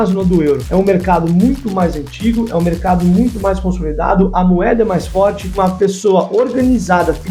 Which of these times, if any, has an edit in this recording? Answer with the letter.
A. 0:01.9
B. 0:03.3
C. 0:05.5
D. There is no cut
C